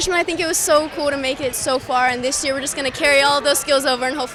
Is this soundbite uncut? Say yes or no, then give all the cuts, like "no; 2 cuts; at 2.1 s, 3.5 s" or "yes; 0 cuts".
yes; 0 cuts